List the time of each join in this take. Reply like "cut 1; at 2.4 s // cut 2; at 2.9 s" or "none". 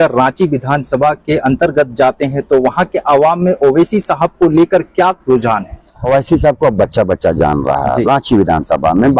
cut 1; at 6.0 s